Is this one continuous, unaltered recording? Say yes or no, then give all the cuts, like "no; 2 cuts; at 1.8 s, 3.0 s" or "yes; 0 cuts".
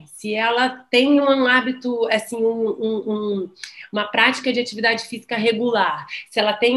yes; 0 cuts